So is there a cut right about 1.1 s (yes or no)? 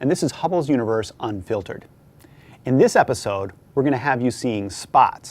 yes